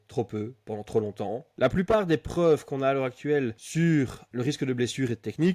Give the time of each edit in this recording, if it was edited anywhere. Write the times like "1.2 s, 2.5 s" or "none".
1.5 s, 3.6 s, 4.2 s